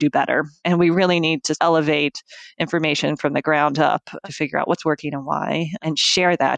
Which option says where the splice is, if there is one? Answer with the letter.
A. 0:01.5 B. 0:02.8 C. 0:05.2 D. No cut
A